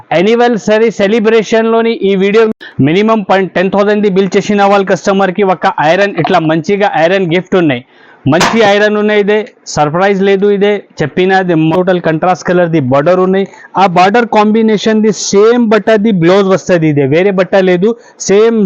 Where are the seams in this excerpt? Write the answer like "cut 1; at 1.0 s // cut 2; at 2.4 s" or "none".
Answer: cut 1; at 2.5 s // cut 2; at 11.7 s